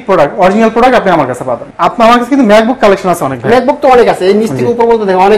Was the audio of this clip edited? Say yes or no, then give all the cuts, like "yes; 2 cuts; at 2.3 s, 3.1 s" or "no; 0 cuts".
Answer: yes; 1 cut; at 1.7 s